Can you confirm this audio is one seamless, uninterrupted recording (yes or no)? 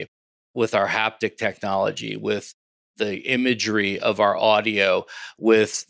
yes